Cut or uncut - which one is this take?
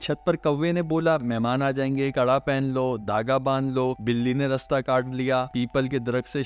uncut